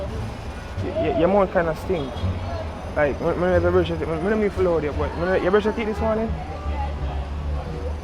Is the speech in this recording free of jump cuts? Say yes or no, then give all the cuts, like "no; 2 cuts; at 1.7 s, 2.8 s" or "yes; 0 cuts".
yes; 0 cuts